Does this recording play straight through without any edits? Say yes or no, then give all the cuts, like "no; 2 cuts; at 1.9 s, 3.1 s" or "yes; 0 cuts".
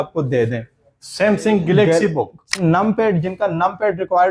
no; 1 cut; at 2.6 s